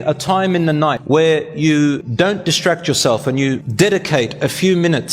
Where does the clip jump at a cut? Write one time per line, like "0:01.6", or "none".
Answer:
0:01.0
0:02.1
0:03.6